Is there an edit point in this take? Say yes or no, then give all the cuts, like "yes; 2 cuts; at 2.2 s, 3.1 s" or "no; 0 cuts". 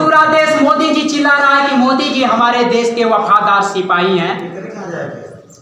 no; 0 cuts